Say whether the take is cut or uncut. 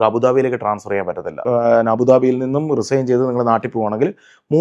cut